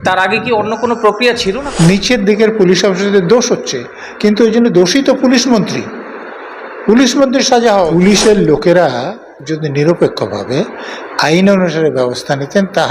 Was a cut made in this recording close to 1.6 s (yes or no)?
yes